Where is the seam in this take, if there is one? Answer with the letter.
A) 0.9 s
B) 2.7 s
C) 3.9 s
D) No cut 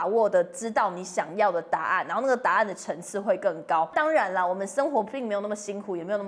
C